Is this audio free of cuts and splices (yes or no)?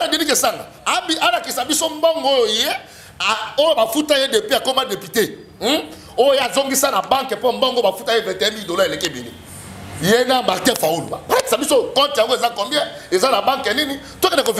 yes